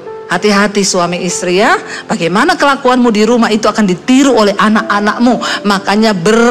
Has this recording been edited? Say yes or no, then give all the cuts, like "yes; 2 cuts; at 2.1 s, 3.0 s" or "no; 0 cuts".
no; 0 cuts